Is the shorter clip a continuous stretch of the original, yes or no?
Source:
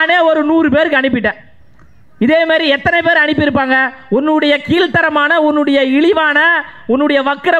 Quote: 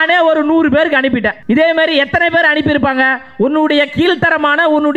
no